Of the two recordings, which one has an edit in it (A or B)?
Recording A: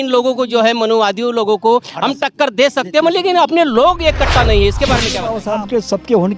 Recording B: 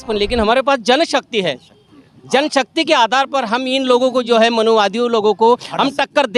A